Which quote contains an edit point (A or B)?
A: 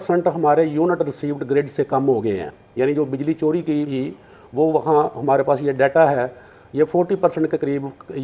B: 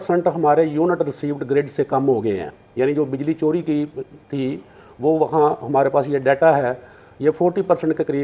A